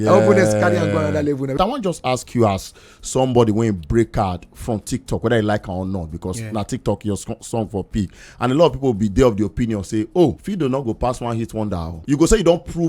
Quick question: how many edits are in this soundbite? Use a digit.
3